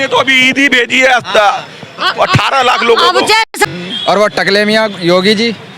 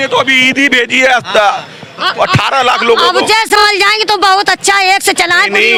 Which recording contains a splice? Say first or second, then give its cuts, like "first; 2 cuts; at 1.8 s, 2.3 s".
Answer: first; 1 cut; at 3.5 s